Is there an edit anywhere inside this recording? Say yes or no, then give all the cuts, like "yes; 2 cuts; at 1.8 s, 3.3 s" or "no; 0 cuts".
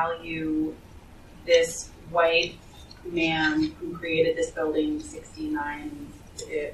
no; 0 cuts